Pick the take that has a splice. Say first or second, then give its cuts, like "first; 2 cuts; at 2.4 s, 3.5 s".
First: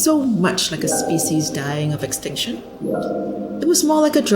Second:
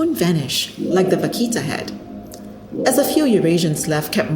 first; 2 cuts; at 2.7 s, 3.6 s